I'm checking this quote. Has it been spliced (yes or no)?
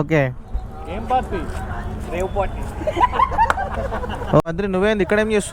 yes